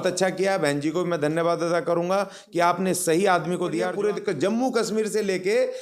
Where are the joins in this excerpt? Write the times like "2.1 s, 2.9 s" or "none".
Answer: 3.9 s